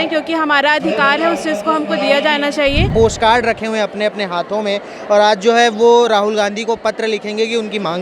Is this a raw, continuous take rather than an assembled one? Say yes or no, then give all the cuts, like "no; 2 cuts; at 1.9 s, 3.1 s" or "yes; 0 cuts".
no; 1 cut; at 2.9 s